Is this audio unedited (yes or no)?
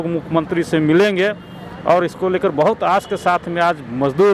yes